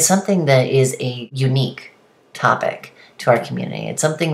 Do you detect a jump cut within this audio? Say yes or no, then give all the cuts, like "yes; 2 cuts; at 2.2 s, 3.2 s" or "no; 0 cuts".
yes; 1 cut; at 1.2 s